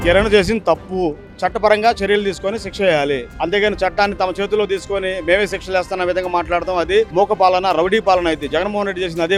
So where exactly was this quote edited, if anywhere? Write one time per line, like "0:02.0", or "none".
none